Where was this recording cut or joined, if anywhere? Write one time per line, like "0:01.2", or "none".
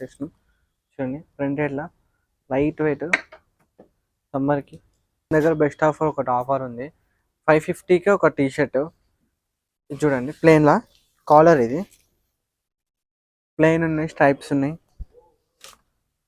0:05.3